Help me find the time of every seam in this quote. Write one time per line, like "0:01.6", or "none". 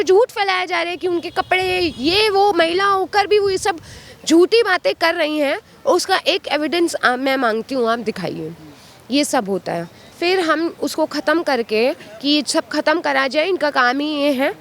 none